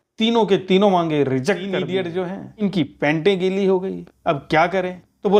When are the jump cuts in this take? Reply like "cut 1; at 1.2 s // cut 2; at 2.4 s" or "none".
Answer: cut 1; at 1.8 s

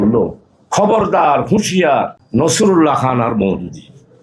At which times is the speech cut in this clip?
cut 1; at 2.2 s

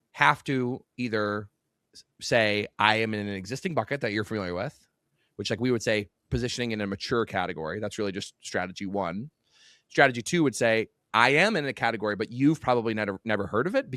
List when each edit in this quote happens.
none

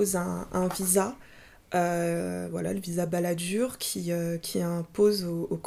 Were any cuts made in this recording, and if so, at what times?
none

